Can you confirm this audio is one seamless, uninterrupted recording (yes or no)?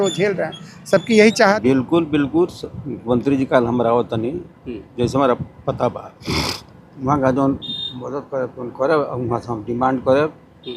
no